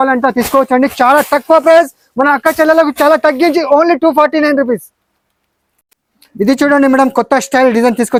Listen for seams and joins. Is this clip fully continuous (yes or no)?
yes